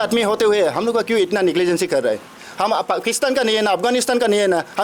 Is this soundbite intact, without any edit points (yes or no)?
no